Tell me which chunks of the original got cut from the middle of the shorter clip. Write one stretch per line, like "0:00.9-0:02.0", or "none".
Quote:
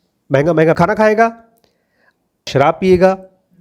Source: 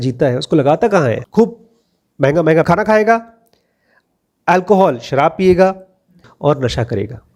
0:04.3-0:05.0